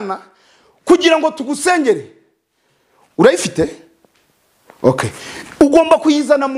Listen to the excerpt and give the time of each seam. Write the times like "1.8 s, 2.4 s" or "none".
none